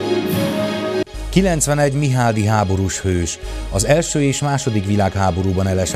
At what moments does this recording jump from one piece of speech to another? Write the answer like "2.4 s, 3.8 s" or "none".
1.0 s